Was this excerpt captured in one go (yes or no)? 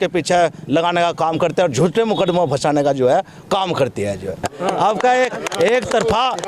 no